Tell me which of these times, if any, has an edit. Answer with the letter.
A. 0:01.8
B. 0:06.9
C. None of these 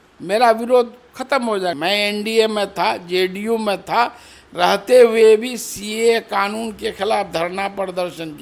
A